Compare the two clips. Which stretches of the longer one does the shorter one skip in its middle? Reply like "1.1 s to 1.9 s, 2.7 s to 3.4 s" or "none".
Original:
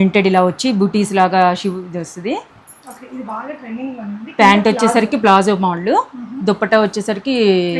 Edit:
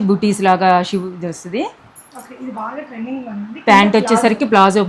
none